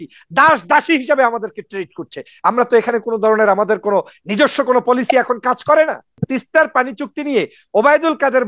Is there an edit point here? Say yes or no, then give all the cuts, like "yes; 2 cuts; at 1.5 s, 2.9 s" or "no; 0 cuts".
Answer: yes; 1 cut; at 6.1 s